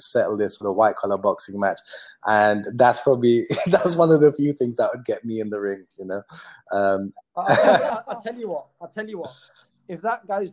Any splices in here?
yes; 1 cut; at 7.9 s

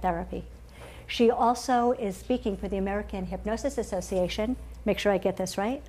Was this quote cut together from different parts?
yes; 1 cut; at 3.7 s

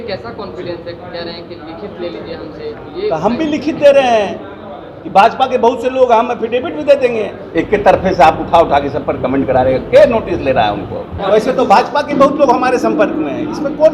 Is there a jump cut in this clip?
yes; 2 cuts; at 7.4 s, 11.1 s

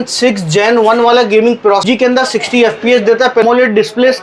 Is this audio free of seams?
no; 2 cuts; at 1.8 s, 3.4 s

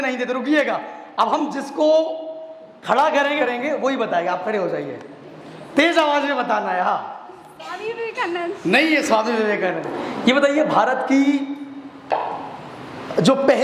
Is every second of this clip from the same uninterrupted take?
no; 2 cuts; at 3.4 s, 10.0 s

